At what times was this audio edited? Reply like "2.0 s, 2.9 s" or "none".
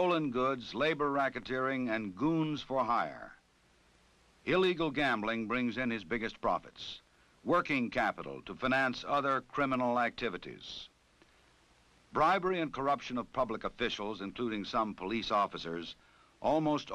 11.4 s